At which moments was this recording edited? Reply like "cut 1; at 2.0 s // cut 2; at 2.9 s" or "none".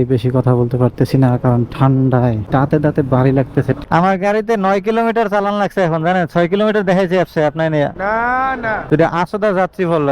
cut 1; at 2.4 s // cut 2; at 3.8 s // cut 3; at 8.9 s

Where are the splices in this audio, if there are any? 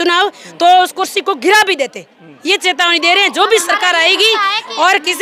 none

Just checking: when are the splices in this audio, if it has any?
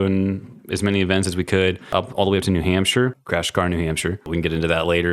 cut 1; at 1.9 s // cut 2; at 3.2 s // cut 3; at 4.3 s

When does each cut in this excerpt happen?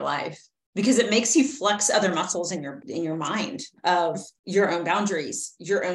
cut 1; at 2.8 s // cut 2; at 4.3 s

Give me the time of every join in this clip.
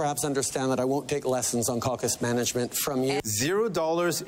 cut 1; at 3.2 s

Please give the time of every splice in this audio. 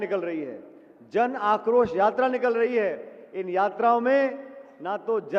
none

